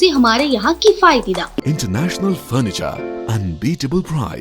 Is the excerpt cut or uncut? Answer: cut